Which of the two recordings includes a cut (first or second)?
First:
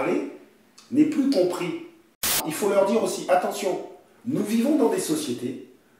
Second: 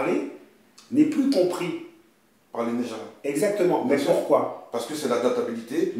first